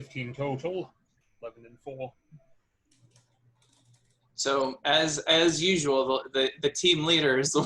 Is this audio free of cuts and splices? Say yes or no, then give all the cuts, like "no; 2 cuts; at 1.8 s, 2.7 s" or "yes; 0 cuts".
yes; 0 cuts